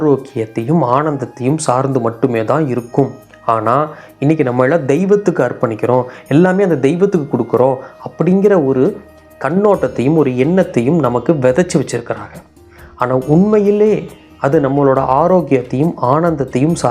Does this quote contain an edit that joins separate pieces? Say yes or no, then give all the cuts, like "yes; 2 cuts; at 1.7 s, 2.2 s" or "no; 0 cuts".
no; 0 cuts